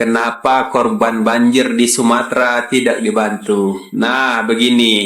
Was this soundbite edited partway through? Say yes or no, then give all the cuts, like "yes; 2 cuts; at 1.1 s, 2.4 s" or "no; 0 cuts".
no; 0 cuts